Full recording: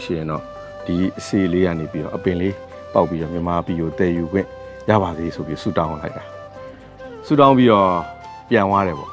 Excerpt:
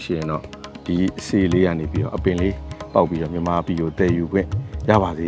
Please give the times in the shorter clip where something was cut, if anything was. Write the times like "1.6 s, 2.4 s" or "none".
none